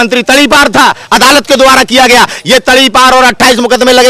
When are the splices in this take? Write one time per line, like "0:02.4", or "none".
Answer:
none